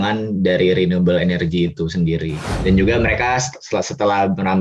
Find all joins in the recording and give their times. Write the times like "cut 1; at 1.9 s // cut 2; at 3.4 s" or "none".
cut 1; at 2.5 s